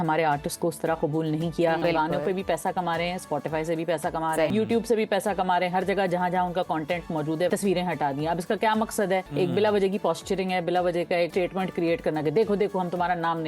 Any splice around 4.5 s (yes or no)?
yes